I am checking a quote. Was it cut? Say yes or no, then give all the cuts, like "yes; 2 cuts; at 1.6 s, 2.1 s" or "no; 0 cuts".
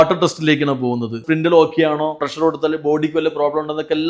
yes; 2 cuts; at 1.2 s, 2.2 s